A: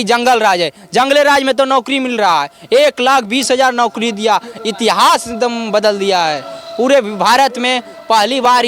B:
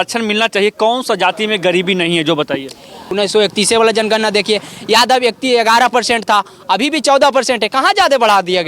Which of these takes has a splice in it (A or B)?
B